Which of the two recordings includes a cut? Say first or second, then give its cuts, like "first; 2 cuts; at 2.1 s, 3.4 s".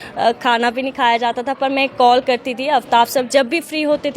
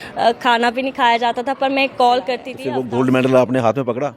second; 1 cut; at 2.5 s